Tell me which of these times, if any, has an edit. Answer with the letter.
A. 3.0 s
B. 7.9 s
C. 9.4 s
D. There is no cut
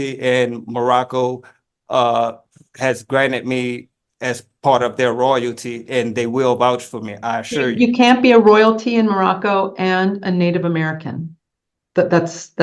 D